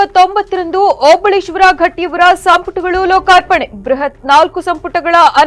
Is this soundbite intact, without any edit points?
yes; 0 cuts

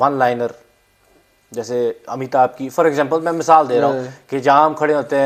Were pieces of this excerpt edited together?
no; 0 cuts

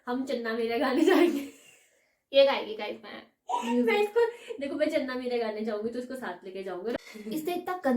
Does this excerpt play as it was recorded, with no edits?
no; 1 cut; at 7.0 s

